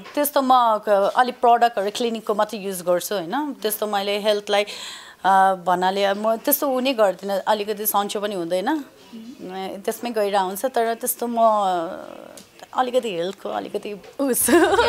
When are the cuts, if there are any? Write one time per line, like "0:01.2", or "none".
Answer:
none